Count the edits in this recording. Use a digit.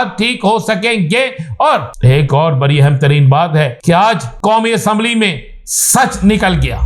2